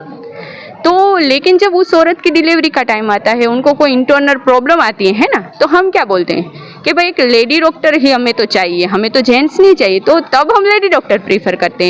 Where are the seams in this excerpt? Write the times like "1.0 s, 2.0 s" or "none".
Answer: none